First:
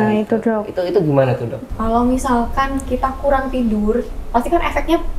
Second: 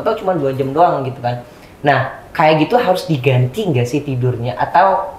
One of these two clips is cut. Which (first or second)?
first